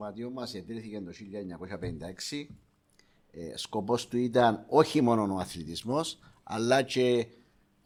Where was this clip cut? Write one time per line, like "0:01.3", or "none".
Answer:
none